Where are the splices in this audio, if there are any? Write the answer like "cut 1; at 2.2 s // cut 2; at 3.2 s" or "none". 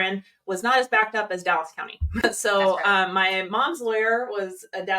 cut 1; at 2.2 s